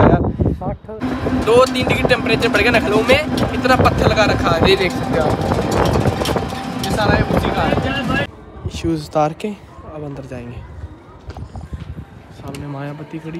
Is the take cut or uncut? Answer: cut